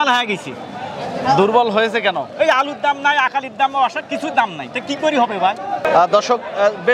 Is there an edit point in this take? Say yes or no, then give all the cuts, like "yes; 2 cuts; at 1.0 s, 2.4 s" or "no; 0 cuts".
no; 0 cuts